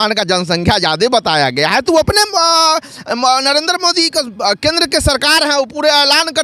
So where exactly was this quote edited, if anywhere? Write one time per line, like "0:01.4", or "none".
none